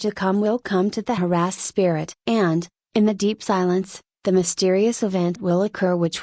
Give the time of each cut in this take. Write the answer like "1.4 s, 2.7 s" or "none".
none